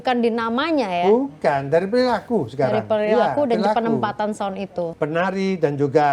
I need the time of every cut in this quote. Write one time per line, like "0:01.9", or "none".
0:04.9